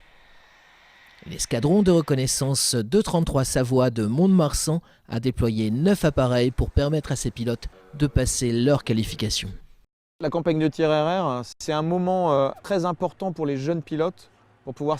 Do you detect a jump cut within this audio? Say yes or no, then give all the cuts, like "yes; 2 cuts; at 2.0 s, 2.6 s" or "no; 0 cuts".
no; 0 cuts